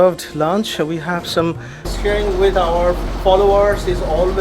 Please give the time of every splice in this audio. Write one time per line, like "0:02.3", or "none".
0:01.8